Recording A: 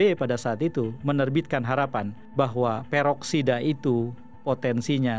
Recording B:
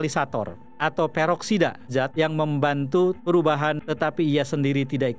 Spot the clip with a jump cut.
B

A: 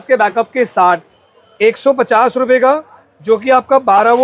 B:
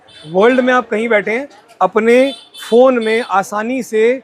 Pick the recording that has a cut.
A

